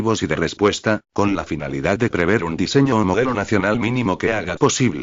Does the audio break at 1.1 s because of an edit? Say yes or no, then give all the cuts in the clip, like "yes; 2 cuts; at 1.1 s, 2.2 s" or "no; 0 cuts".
yes; 1 cut; at 1.1 s